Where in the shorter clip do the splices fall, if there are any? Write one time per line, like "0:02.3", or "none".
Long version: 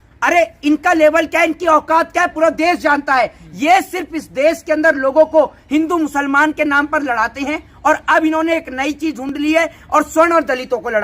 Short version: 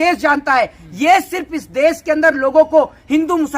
none